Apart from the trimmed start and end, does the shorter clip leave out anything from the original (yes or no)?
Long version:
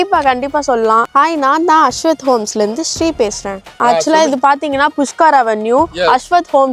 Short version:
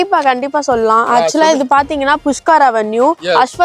yes